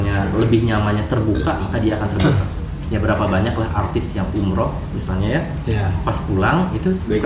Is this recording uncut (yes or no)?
yes